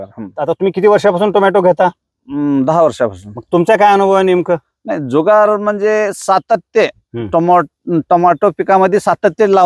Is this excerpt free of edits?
yes; 0 cuts

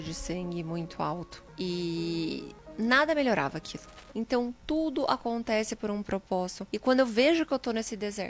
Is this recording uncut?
no; 4 cuts; at 1.4 s, 2.6 s, 4.4 s, 6.6 s

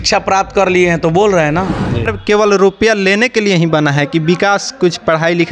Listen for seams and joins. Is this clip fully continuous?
no; 1 cut; at 2.2 s

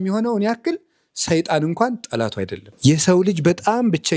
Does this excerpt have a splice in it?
yes; 1 cut; at 2.6 s

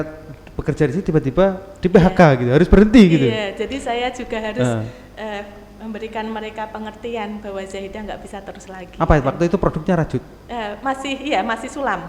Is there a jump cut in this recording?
no; 0 cuts

